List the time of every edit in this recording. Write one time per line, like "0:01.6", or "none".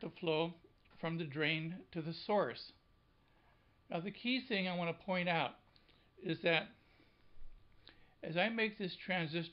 none